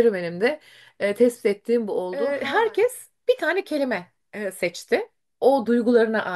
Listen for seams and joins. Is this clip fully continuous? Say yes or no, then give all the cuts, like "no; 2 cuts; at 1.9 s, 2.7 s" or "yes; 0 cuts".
no; 1 cut; at 2.4 s